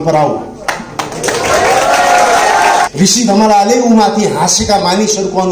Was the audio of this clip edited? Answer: yes; 1 cut; at 2.9 s

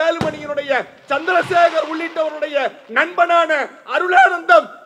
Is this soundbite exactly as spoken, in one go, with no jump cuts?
yes; 0 cuts

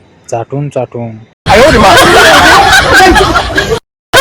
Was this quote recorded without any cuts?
no; 1 cut; at 1.3 s

